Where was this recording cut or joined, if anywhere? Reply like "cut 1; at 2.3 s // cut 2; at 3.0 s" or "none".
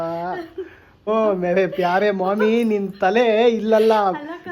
cut 1; at 1.1 s